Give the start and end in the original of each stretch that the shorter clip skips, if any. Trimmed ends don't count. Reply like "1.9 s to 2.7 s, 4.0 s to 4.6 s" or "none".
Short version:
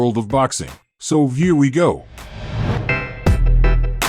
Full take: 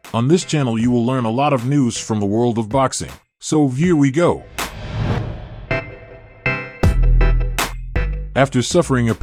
5.2 s to 6.4 s